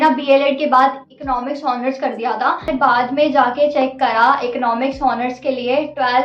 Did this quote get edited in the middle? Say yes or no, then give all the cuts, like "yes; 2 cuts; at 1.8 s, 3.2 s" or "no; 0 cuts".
yes; 1 cut; at 2.7 s